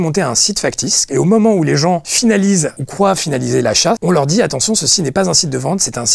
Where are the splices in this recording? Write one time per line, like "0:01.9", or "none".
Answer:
0:01.1
0:04.0

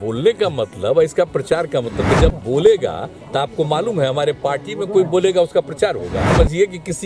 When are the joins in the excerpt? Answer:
0:02.2
0:06.3

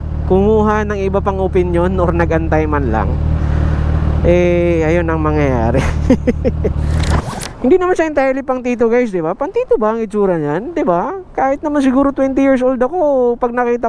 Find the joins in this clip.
0:07.1

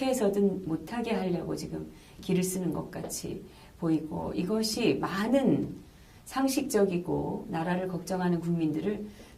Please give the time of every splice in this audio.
0:04.5

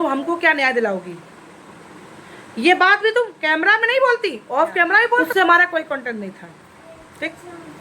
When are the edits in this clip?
0:05.3

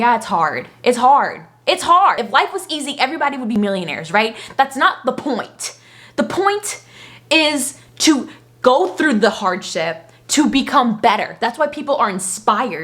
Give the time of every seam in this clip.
0:02.2
0:03.5

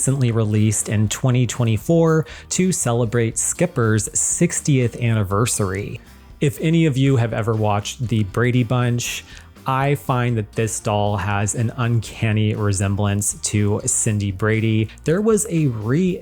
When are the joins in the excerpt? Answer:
0:06.0
0:14.9

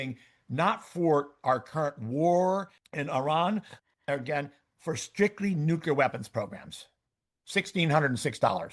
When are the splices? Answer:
none

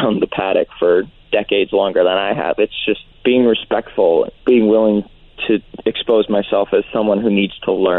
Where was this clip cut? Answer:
0:03.1
0:04.3
0:05.7

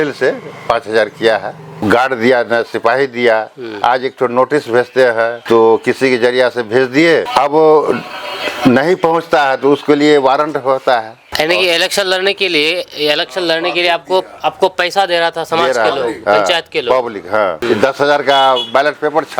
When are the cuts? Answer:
0:01.7
0:05.4
0:07.3
0:11.2
0:17.6

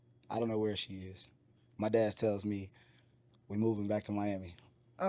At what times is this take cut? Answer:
none

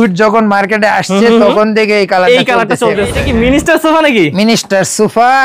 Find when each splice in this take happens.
0:03.2

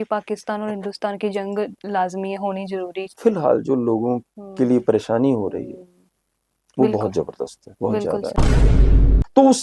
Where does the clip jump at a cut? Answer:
0:03.0
0:08.7

